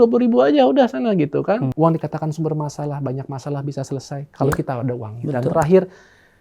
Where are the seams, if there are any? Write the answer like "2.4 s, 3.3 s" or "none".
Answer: 1.7 s